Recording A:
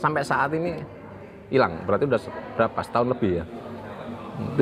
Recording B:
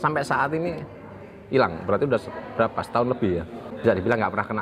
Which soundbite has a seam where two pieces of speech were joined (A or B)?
B